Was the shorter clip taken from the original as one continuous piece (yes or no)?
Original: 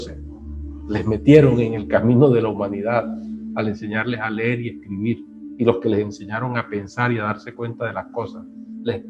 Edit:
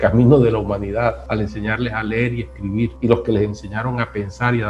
no